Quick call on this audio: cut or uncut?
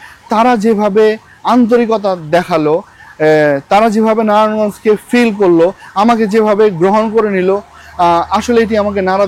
uncut